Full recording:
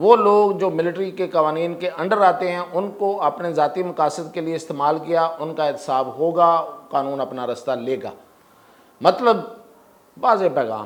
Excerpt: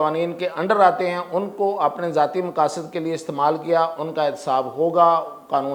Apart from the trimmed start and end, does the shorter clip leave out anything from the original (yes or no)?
no